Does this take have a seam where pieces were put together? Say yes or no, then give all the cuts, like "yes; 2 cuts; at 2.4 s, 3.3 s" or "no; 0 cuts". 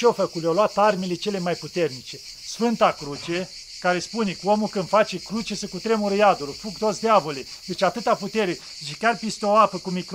no; 0 cuts